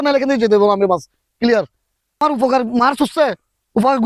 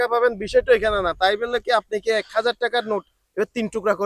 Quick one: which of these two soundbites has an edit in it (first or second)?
first